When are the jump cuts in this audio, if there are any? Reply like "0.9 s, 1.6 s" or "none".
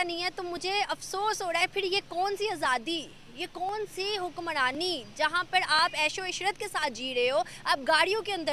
none